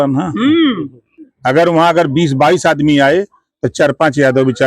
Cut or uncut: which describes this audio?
cut